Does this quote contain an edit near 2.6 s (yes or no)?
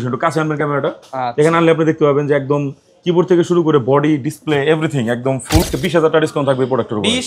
no